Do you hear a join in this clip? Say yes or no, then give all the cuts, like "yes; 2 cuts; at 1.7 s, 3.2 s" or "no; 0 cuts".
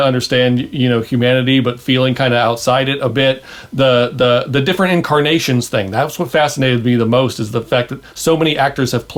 no; 0 cuts